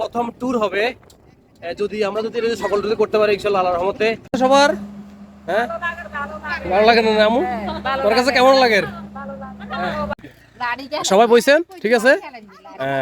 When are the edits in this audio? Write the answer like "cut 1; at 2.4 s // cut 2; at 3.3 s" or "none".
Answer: cut 1; at 4.2 s // cut 2; at 10.1 s